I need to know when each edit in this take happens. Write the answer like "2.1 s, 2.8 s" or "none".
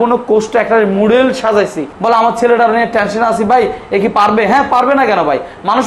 1.9 s